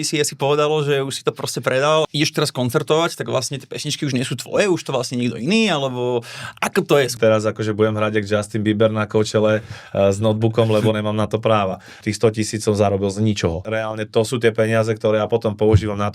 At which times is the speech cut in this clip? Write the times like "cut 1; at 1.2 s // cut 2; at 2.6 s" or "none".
cut 1; at 2.0 s // cut 2; at 7.1 s // cut 3; at 12.0 s // cut 4; at 13.6 s